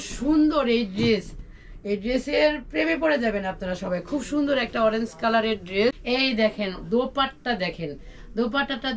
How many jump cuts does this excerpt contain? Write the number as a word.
one